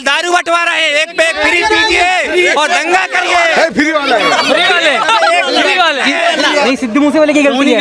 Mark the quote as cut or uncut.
cut